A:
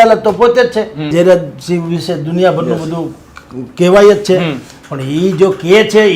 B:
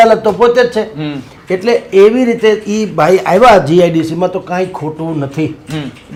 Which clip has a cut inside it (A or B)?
A